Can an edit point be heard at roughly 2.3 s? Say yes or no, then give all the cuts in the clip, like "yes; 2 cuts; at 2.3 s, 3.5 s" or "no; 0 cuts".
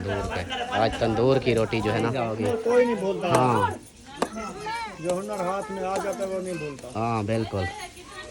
yes; 1 cut; at 2.3 s